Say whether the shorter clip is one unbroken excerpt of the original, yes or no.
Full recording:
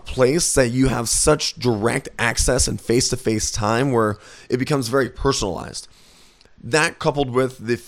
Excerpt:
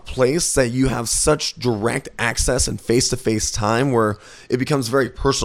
yes